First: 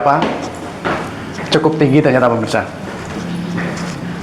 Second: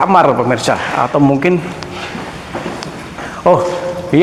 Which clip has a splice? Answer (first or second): first